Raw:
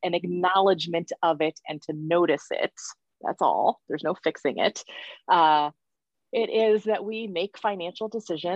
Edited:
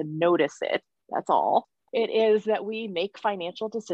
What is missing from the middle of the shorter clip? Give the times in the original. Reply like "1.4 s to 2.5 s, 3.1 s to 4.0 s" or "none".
2.8 s to 3.1 s, 3.9 s to 6.2 s